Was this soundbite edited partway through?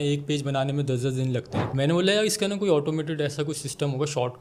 no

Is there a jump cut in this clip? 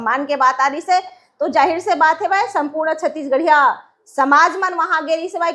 no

